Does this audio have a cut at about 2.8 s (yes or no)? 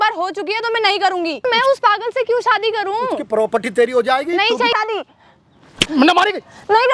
no